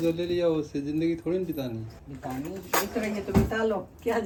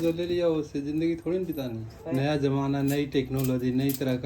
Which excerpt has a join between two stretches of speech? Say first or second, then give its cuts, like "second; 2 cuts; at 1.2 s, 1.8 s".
second; 1 cut; at 2.0 s